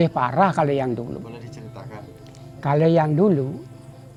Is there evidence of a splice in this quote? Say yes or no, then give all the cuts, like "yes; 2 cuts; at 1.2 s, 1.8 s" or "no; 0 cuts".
no; 0 cuts